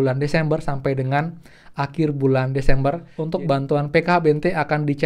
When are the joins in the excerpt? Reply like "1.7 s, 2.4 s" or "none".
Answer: 3.1 s